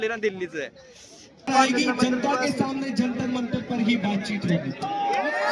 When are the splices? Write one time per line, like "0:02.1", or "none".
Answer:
0:01.5